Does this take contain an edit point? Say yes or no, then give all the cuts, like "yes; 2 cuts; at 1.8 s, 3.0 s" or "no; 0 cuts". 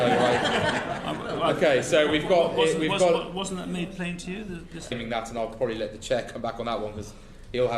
yes; 1 cut; at 5.0 s